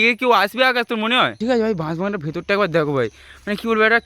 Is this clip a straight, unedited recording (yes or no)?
no